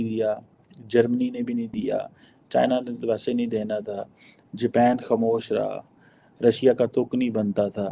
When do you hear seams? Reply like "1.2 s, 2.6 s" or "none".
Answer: none